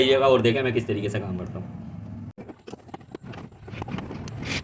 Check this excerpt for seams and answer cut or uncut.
uncut